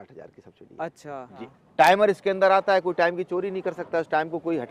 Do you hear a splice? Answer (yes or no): yes